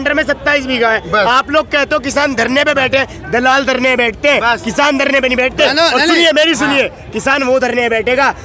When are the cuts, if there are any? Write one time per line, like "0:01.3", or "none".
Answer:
none

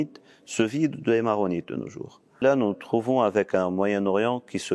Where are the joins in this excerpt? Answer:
0:02.4

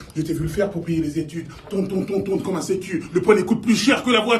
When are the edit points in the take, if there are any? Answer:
0:01.0

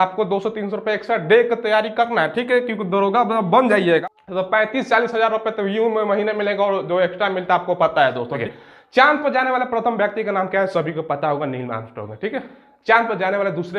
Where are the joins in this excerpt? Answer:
0:04.0
0:08.5

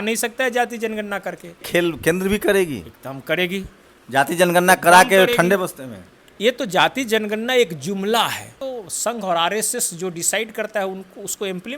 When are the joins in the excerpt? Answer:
0:01.6
0:08.6

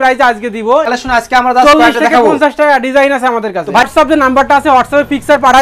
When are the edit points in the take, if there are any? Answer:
0:00.9
0:03.9

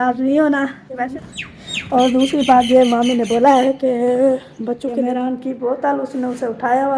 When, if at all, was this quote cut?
0:01.0
0:05.0

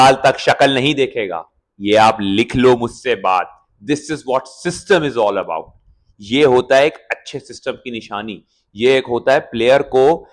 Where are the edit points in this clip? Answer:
none

